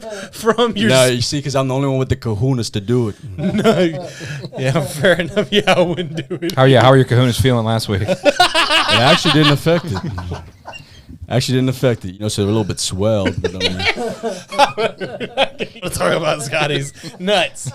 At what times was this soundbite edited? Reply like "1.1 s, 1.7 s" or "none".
12.1 s, 15.9 s